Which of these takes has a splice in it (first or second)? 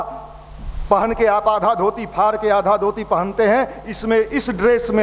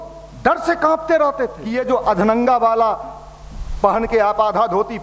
second